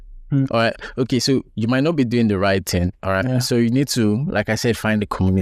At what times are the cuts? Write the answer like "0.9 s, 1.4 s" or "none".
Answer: none

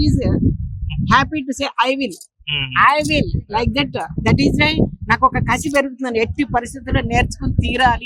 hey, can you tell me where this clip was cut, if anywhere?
none

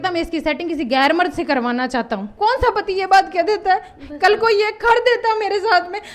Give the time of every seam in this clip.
2.3 s

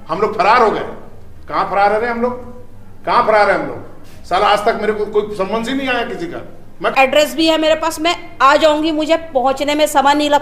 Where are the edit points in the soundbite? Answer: 6.9 s

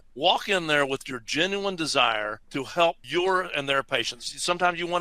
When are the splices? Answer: 2.8 s

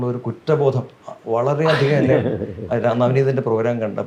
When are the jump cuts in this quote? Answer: none

